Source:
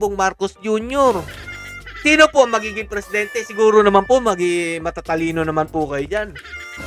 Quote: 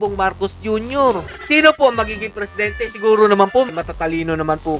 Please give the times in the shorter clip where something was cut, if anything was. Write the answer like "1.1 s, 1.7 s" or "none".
1.3 s, 3.7 s